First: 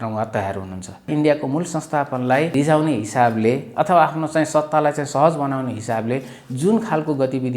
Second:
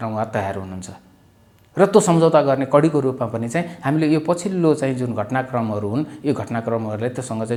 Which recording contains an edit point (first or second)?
first